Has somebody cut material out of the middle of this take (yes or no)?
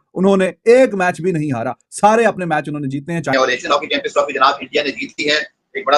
yes